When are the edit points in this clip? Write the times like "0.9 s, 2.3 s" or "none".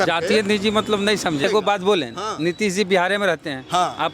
1.4 s

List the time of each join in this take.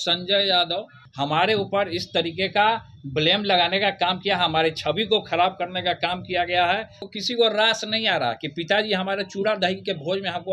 1.0 s, 7.1 s

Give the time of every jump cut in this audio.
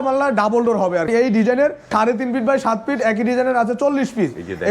1.1 s, 1.8 s

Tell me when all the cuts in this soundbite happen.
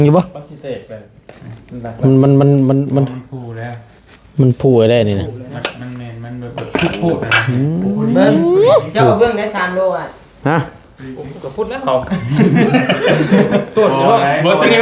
none

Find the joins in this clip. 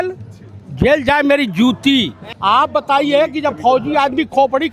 2.2 s

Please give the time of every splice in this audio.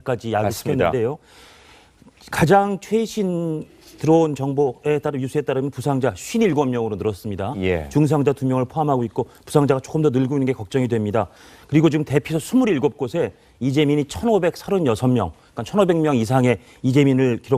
9.1 s

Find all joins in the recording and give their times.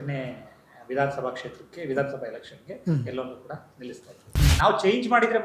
4.4 s

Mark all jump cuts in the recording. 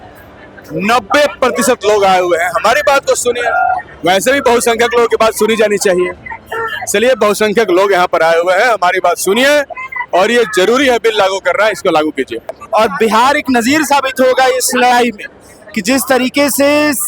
12.5 s

